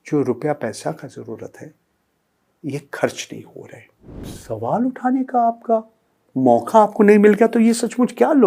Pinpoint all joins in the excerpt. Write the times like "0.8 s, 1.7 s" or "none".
4.3 s